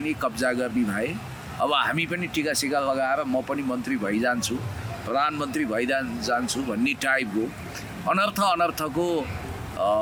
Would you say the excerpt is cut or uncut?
uncut